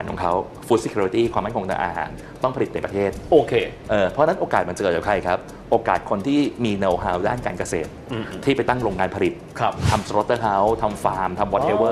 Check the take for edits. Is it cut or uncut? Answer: uncut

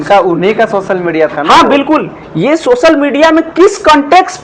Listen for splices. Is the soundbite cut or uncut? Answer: uncut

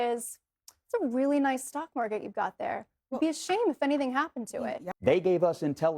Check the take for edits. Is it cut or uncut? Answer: cut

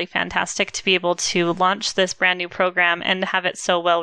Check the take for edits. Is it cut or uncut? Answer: uncut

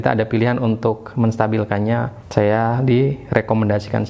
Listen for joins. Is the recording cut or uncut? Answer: cut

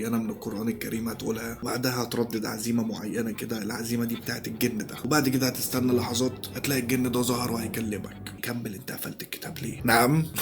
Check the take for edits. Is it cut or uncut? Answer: cut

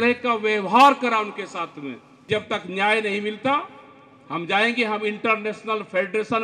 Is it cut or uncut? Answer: cut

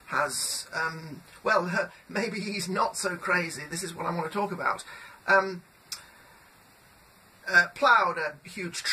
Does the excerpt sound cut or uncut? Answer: cut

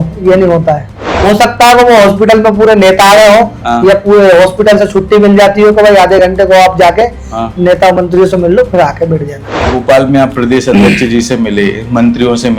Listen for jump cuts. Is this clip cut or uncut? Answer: cut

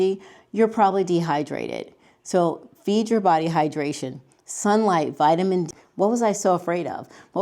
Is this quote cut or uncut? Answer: cut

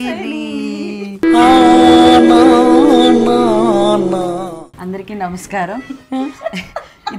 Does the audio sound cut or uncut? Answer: cut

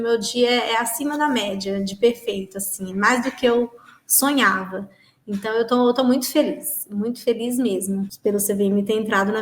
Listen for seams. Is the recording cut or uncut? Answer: cut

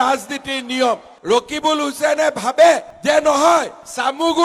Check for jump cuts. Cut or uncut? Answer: cut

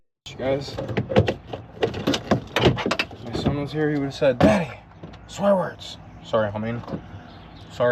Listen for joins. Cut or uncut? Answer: uncut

